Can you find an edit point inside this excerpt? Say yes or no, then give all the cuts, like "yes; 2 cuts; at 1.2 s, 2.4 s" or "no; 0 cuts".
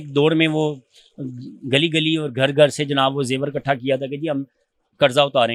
no; 0 cuts